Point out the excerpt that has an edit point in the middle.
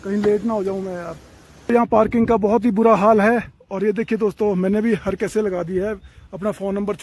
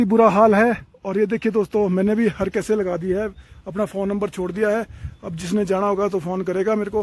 first; 1 cut; at 1.7 s

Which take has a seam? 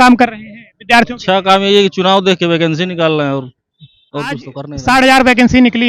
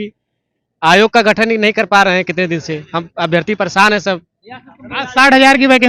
first; 1 cut; at 4.6 s

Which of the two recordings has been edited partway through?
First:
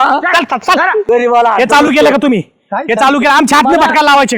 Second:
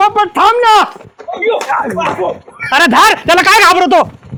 first; 1 cut; at 1.0 s

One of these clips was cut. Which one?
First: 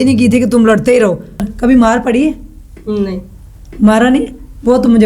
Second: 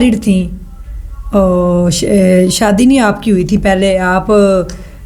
first; 1 cut; at 1.4 s

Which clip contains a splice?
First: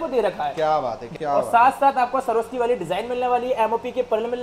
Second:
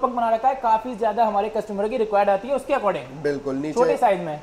first; 1 cut; at 1.1 s

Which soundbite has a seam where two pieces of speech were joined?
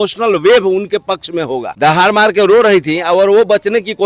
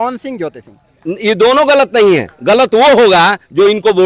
first; 1 cut; at 1.6 s

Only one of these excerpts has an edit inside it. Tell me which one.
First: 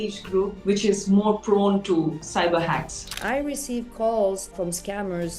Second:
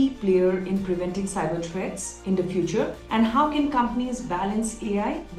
first; 3 cuts; at 2.2 s, 3.2 s, 4.5 s

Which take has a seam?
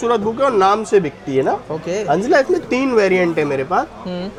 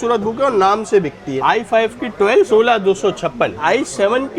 second; 3 cuts; at 1.3 s, 2.5 s, 3.6 s

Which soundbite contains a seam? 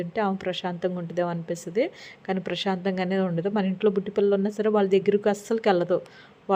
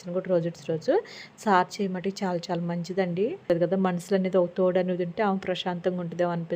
second; 1 cut; at 3.4 s

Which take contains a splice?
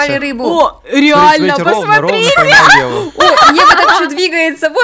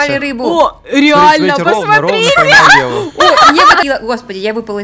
second; 1 cut; at 3.8 s

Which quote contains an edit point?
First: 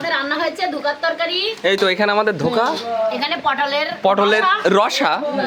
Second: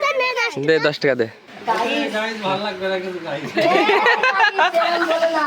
second; 1 cut; at 1.5 s

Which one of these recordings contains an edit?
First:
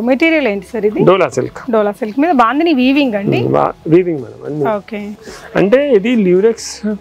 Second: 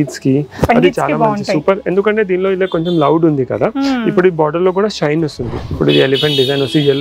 second; 1 cut; at 5.5 s

